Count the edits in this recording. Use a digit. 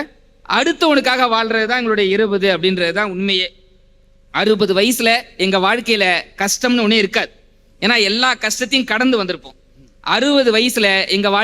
0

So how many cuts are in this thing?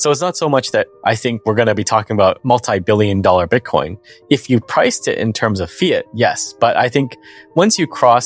1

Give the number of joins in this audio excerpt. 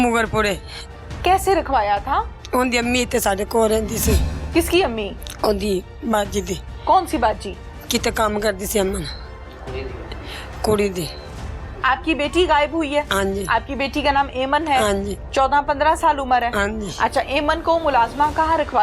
0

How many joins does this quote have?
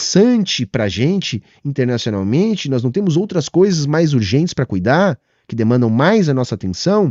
0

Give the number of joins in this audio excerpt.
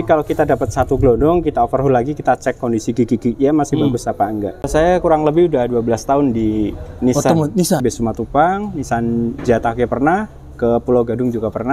2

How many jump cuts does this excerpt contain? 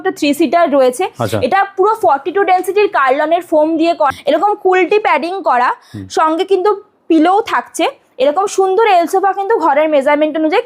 1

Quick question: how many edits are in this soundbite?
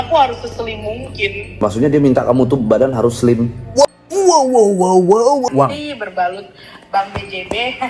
1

